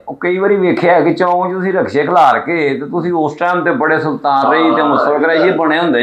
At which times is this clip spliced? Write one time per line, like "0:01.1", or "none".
none